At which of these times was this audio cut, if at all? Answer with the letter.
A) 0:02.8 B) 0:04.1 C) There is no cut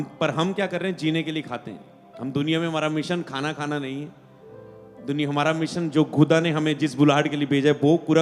C